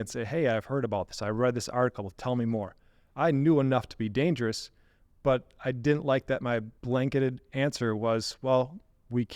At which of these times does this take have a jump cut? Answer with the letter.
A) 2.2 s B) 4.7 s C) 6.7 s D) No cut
C